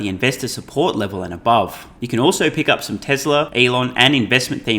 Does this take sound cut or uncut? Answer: cut